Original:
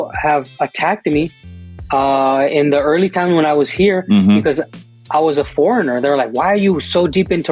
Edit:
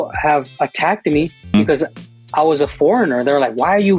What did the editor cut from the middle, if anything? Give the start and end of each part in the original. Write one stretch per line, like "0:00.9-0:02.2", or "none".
0:01.5-0:04.3